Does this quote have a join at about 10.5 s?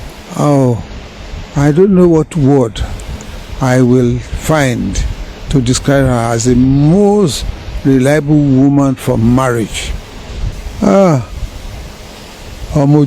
yes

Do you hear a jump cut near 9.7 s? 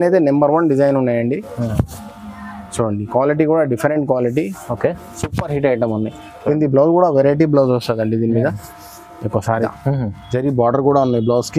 yes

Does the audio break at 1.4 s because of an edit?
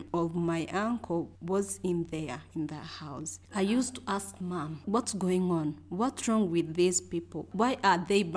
no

